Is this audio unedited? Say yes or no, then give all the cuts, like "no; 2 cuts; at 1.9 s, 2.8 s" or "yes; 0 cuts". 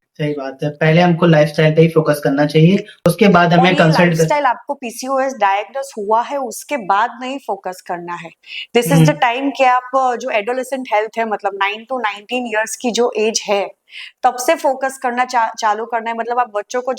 no; 1 cut; at 2.9 s